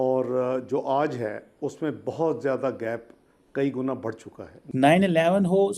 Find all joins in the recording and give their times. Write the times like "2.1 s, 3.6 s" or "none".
4.6 s